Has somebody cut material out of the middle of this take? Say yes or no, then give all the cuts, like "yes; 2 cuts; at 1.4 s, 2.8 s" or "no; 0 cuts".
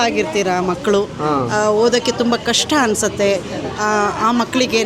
no; 0 cuts